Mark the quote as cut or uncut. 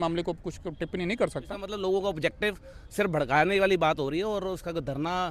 cut